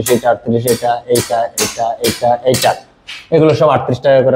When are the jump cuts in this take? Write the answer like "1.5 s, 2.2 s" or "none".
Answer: none